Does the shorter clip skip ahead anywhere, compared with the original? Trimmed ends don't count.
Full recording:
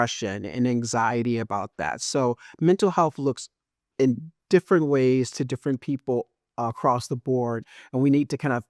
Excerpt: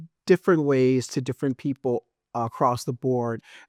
no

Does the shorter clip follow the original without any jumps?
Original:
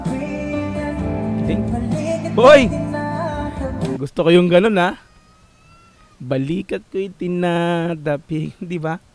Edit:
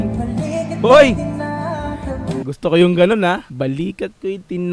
no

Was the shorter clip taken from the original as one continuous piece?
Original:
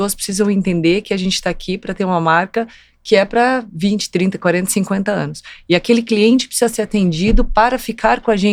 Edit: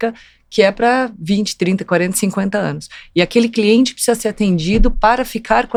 yes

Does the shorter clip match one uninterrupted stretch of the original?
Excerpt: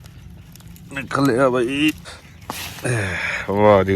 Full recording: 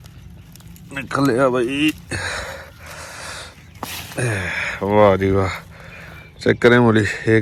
no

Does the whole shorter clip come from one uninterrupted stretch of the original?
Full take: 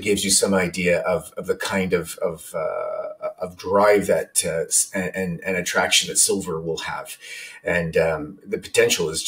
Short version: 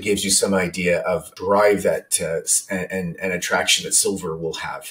no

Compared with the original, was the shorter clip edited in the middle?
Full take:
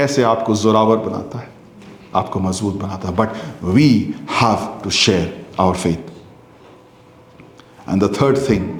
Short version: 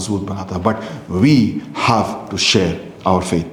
no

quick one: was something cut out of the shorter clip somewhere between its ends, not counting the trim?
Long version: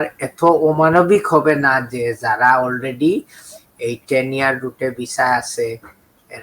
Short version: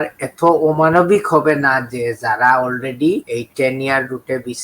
yes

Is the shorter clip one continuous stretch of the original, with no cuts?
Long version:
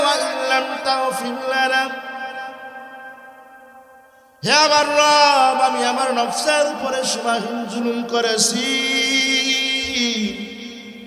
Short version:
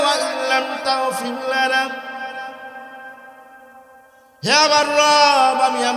yes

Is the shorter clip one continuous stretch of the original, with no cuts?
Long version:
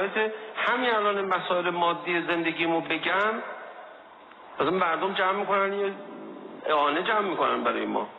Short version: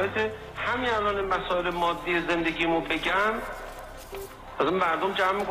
yes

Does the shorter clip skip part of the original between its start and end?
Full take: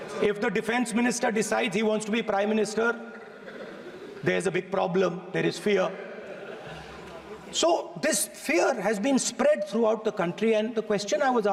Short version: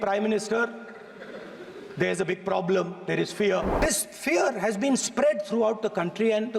yes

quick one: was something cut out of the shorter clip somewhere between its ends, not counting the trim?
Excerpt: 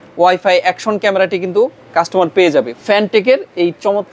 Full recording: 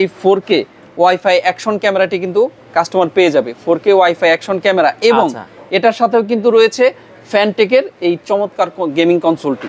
yes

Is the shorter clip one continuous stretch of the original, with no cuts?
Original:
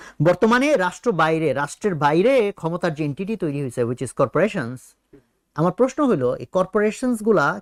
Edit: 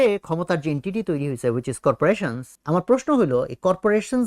no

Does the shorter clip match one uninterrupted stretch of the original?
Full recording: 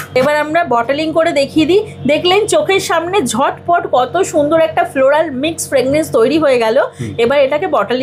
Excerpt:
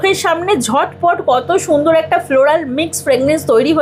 yes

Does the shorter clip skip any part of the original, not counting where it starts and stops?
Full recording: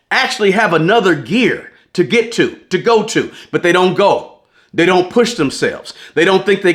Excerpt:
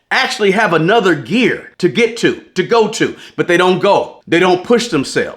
yes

